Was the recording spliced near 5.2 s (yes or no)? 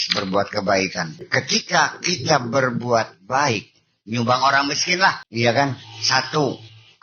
yes